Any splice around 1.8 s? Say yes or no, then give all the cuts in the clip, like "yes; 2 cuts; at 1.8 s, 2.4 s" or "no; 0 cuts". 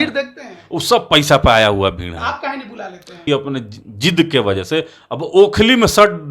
no; 1 cut; at 3.2 s